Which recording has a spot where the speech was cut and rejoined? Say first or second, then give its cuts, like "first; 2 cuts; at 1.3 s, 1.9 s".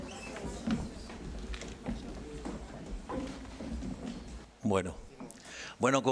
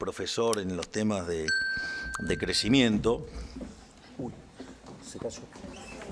first; 1 cut; at 4.3 s